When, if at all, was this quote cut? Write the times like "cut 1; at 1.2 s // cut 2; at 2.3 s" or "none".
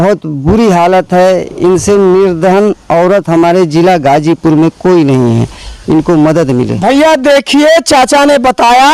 none